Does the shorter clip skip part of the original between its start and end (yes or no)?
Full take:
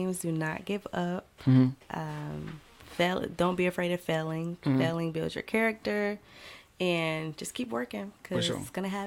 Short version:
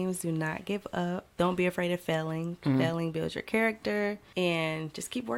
yes